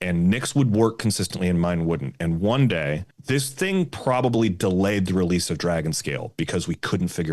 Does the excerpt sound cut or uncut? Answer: cut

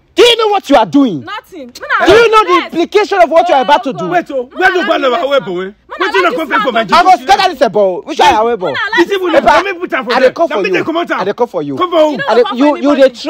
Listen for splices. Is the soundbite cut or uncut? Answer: uncut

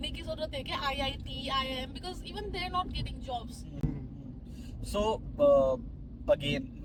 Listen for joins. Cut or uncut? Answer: uncut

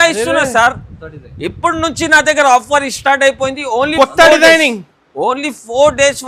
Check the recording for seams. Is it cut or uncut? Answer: uncut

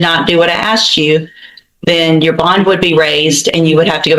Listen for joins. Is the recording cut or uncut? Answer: uncut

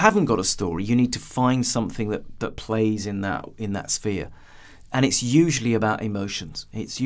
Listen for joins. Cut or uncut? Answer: uncut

